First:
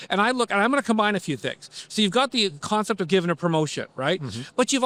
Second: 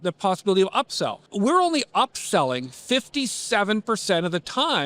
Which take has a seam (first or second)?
second